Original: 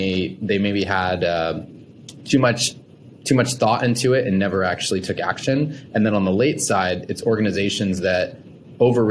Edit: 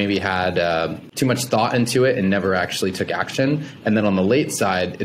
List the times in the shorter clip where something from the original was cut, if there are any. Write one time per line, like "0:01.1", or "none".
0:01.0